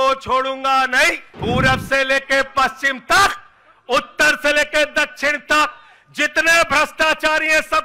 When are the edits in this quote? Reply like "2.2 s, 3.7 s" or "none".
1.3 s